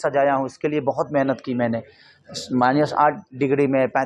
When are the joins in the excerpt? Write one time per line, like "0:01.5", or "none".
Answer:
none